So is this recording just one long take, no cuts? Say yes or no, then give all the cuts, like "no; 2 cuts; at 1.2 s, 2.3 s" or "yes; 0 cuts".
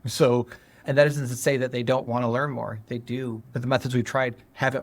no; 1 cut; at 3.4 s